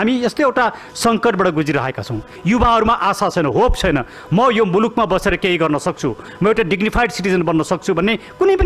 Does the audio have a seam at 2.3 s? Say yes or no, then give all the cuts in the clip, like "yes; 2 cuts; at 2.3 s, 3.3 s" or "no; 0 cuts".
yes; 1 cut; at 2.3 s